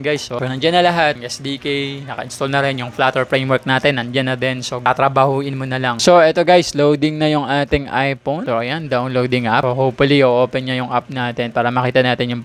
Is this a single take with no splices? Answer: yes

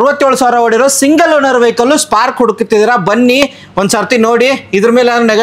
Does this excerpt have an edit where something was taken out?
no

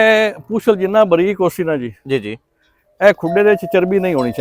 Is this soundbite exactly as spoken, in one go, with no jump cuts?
yes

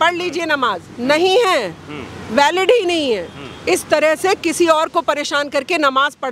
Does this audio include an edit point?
no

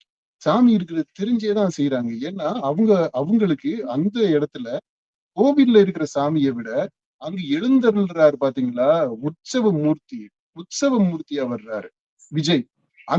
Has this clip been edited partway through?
no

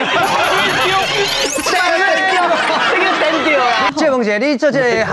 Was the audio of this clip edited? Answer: yes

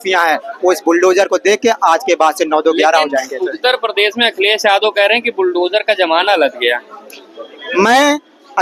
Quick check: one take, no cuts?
yes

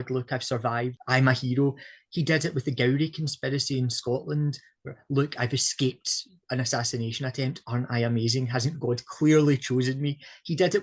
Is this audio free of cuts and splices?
no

